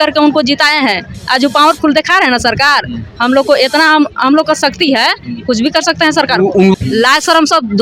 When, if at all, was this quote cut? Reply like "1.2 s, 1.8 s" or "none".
6.8 s

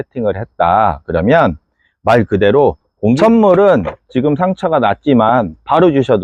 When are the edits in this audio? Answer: 3.2 s

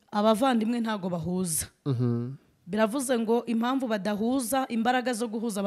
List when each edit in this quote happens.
none

